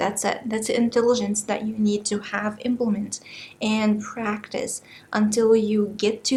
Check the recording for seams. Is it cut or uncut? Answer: uncut